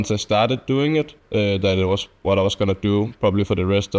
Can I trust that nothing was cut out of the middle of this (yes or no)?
yes